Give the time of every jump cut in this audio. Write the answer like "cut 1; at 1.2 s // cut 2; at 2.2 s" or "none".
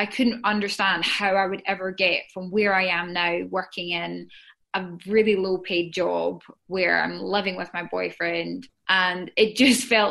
cut 1; at 8.7 s

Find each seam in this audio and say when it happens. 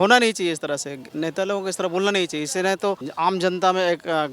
cut 1; at 1.0 s // cut 2; at 3.1 s

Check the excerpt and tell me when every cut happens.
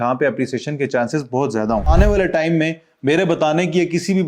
cut 1; at 1.9 s

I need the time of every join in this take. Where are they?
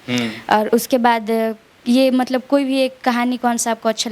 none

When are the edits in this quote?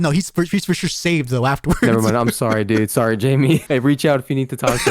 cut 1; at 3.6 s

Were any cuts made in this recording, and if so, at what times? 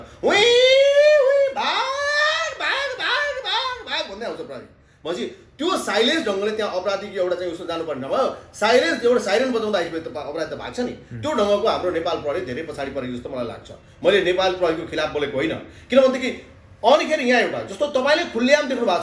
none

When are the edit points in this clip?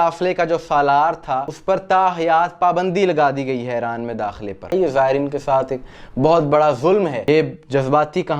cut 1; at 1.5 s // cut 2; at 4.7 s // cut 3; at 7.2 s

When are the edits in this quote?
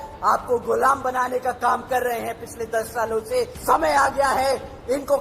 cut 1; at 3.5 s

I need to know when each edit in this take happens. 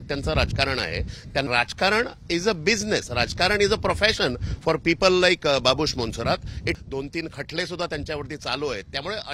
cut 1; at 1.5 s // cut 2; at 6.7 s

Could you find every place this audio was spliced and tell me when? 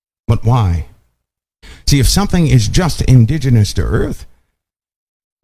cut 1; at 1.6 s

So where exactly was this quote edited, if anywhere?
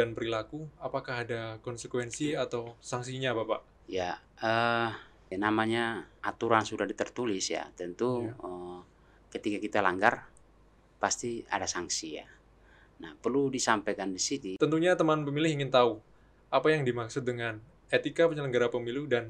cut 1; at 5.1 s // cut 2; at 6.1 s // cut 3; at 14.5 s

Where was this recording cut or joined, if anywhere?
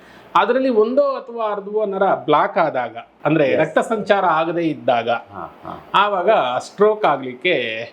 cut 1; at 3.1 s

